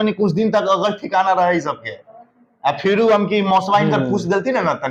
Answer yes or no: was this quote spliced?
no